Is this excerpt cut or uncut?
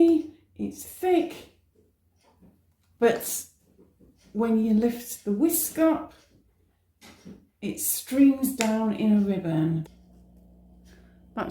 cut